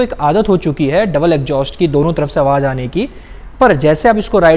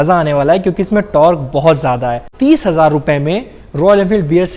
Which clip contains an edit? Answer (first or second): second